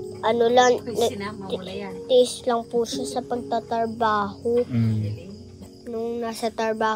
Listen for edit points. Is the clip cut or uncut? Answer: cut